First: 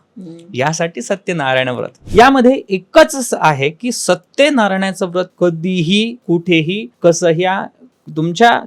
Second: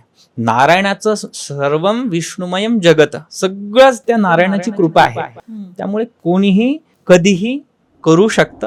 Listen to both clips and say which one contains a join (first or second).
first